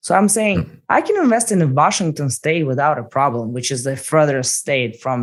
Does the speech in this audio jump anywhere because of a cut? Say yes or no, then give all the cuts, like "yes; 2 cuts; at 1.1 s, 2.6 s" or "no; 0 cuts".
no; 0 cuts